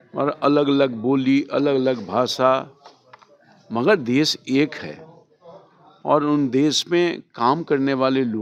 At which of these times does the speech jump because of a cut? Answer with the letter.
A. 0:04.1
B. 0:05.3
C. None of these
C